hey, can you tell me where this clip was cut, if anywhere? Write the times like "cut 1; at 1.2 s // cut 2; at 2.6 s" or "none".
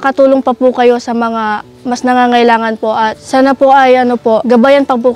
cut 1; at 3.2 s // cut 2; at 4.4 s